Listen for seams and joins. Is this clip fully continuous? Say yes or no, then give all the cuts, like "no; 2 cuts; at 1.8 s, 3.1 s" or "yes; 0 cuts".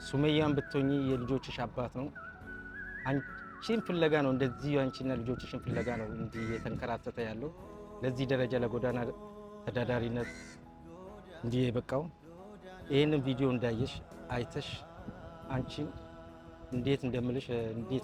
yes; 0 cuts